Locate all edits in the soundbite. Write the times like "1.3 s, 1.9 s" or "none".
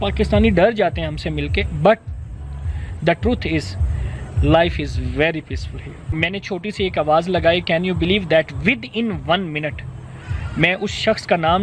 6.2 s